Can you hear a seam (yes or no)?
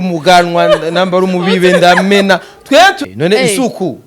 yes